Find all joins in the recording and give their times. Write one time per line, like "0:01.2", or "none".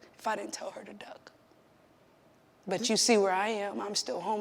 0:02.6